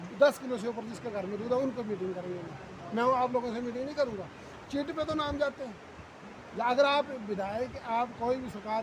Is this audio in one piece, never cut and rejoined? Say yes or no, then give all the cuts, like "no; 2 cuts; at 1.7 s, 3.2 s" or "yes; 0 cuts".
yes; 0 cuts